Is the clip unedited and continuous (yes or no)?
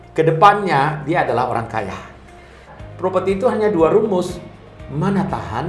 no